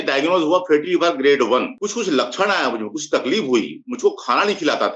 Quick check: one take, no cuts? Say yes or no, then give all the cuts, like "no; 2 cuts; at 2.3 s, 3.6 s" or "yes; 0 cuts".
no; 1 cut; at 1.7 s